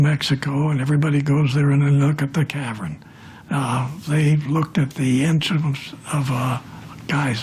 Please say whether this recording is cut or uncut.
cut